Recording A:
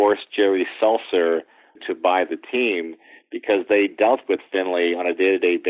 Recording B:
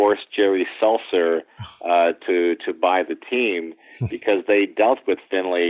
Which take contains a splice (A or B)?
A